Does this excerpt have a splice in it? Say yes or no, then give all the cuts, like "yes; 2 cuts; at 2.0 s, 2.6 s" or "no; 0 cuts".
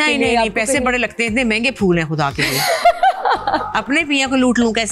no; 0 cuts